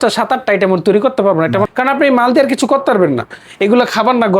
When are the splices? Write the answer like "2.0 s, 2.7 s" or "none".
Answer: 1.7 s